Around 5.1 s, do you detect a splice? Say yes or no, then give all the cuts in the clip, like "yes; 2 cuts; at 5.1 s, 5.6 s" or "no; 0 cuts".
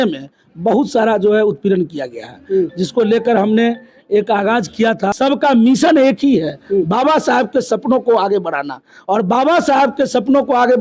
yes; 1 cut; at 5.1 s